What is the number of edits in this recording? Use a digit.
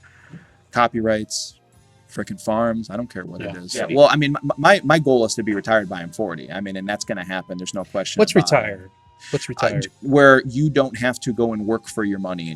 1